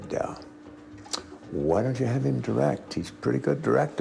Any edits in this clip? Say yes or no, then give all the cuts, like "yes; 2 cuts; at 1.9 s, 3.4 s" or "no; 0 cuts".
no; 0 cuts